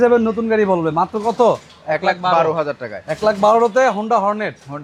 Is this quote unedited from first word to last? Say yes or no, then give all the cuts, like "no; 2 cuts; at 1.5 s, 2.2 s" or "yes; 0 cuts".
yes; 0 cuts